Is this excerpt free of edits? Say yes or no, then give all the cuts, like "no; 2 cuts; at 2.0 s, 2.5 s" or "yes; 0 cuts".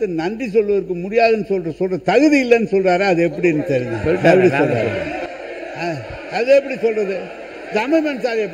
yes; 0 cuts